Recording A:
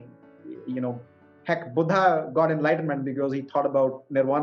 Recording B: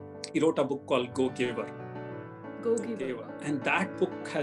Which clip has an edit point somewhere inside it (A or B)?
B